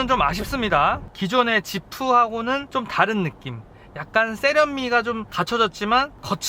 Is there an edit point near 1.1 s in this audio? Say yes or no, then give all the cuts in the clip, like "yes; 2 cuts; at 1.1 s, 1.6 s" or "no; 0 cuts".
yes; 1 cut; at 1.1 s